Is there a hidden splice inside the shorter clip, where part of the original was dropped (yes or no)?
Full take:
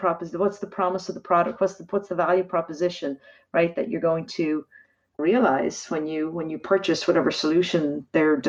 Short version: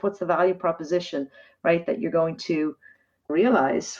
no